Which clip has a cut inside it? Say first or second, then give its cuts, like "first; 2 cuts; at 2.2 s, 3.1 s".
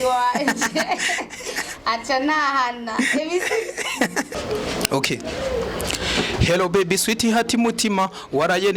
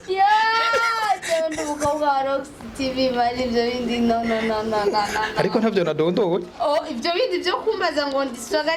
first; 1 cut; at 4.3 s